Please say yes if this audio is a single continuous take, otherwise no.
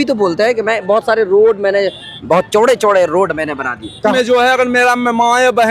no